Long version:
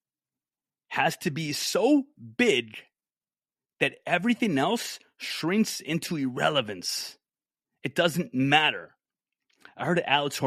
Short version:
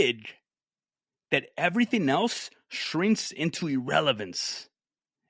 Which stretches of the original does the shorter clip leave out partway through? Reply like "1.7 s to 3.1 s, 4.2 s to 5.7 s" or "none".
none